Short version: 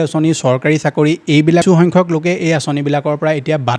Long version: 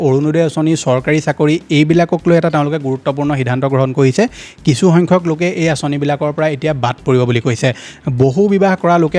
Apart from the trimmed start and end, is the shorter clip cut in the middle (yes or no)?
yes